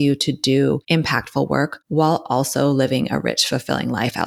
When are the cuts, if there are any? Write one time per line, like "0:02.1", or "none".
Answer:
0:00.8
0:01.8